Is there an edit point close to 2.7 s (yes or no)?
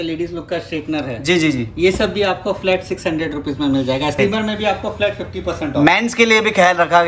no